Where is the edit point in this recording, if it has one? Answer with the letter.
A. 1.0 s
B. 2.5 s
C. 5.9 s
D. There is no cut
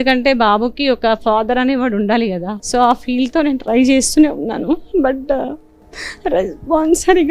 B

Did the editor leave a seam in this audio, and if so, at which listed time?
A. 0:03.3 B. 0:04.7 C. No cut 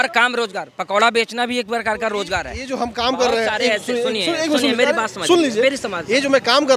C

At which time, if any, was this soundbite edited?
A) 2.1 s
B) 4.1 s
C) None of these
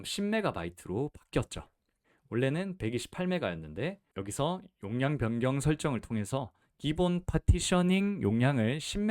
B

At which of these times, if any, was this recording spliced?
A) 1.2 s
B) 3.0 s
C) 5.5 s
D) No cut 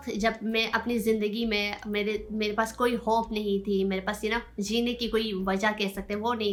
D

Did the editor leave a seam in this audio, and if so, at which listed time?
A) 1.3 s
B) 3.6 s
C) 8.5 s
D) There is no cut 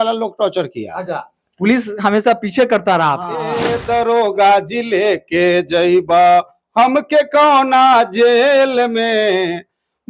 B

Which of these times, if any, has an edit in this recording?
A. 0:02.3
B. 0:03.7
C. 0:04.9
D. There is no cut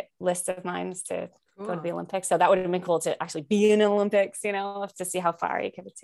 D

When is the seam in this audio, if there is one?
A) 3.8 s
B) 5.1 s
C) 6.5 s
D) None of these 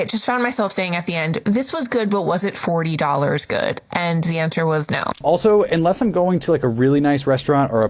B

